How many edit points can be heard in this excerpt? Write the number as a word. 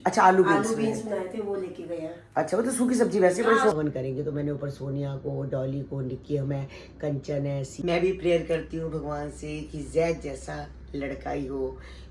two